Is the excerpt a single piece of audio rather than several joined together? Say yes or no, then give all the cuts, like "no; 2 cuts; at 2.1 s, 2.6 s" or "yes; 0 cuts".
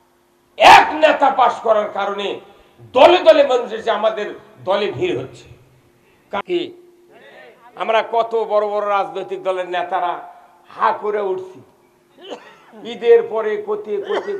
no; 1 cut; at 6.4 s